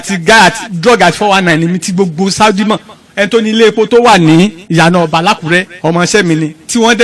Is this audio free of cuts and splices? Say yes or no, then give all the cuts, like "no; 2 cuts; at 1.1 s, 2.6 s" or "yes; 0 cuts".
yes; 0 cuts